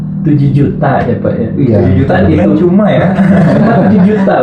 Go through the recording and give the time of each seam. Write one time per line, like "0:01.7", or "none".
none